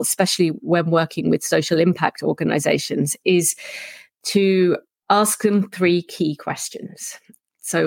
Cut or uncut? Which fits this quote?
cut